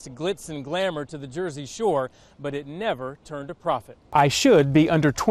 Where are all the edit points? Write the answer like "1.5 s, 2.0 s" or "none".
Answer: 3.9 s